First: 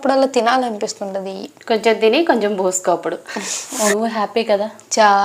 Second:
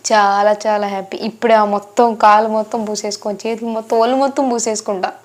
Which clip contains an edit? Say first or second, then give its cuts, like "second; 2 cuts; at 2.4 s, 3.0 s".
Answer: first; 1 cut; at 3.9 s